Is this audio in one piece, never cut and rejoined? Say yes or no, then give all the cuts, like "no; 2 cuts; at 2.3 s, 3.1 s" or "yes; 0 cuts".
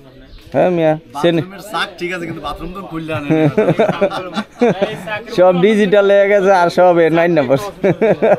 yes; 0 cuts